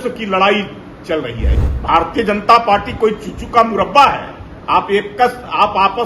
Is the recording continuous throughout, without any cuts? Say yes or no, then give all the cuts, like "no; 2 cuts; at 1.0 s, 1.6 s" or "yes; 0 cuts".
no; 1 cut; at 1.4 s